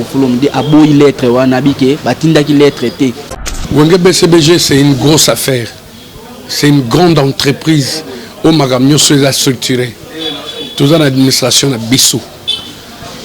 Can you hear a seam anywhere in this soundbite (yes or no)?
yes